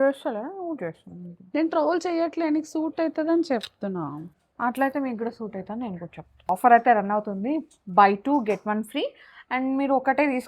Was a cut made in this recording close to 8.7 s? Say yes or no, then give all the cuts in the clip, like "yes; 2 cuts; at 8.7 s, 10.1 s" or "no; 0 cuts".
no; 1 cut; at 6.5 s